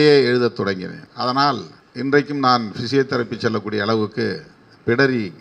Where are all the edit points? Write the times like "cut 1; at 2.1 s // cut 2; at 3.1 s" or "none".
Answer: cut 1; at 1.0 s // cut 2; at 1.8 s

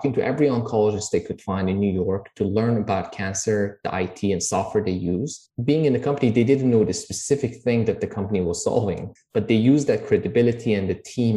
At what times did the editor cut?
cut 1; at 5.4 s // cut 2; at 9.0 s

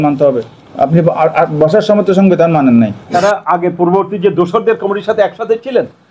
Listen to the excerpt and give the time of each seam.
cut 1; at 3.0 s

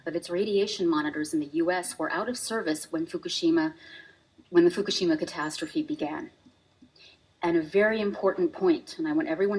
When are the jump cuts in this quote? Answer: cut 1; at 2.4 s

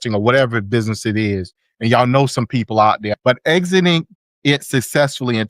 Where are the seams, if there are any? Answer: cut 1; at 3.1 s

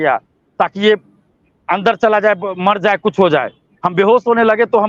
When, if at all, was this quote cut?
none

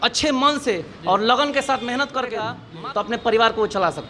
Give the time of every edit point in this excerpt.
cut 1; at 2.6 s

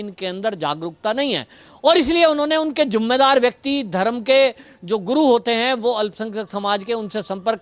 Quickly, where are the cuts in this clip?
none

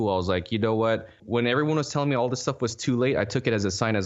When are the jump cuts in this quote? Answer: cut 1; at 1.1 s

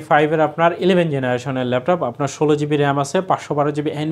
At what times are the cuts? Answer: none

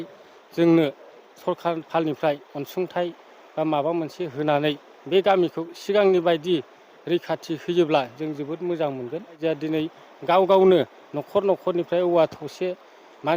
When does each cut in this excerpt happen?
cut 1; at 9.4 s

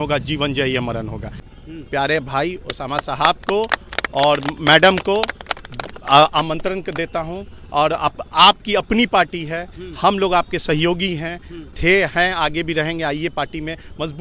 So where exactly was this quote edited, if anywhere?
cut 1; at 1.5 s

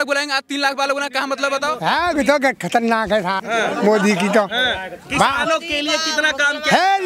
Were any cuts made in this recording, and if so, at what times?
cut 1; at 1.7 s // cut 2; at 3.4 s

